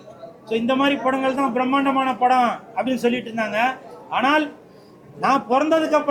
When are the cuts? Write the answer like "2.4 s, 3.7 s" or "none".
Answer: none